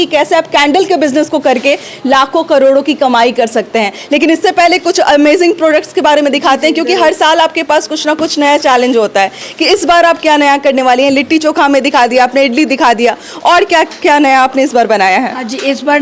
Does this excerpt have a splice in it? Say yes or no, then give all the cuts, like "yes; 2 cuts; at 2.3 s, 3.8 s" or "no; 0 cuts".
no; 0 cuts